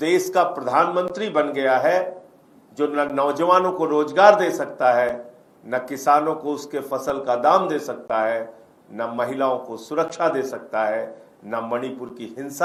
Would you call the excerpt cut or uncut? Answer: uncut